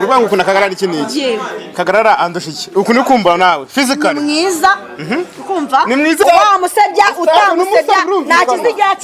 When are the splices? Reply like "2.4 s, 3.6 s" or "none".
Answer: 6.2 s